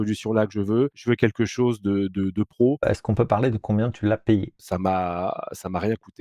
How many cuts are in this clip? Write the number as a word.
three